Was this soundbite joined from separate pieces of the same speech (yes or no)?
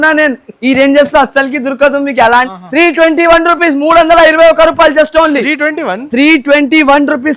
yes